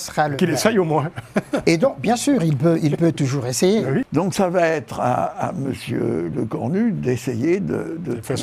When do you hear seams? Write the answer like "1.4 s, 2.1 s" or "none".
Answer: 4.1 s